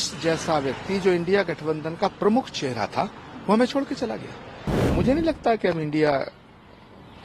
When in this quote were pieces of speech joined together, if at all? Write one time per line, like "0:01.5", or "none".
0:04.8